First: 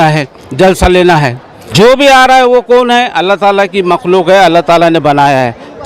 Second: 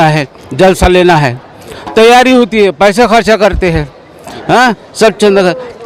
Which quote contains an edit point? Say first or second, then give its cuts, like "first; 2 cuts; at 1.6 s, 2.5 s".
first; 1 cut; at 1.5 s